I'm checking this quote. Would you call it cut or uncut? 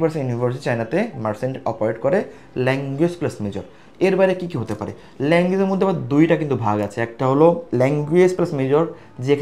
uncut